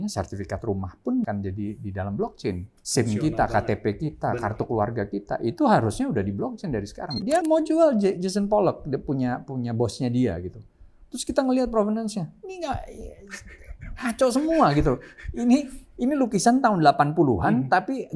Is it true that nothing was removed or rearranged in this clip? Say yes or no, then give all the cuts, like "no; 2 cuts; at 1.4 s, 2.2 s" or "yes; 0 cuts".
no; 3 cuts; at 1.3 s, 2.7 s, 7.4 s